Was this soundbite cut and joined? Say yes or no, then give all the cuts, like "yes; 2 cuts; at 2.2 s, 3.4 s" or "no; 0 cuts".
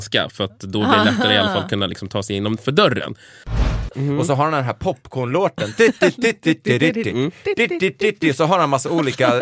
yes; 1 cut; at 3.5 s